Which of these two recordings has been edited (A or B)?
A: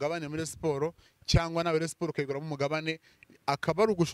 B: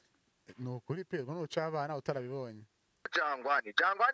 B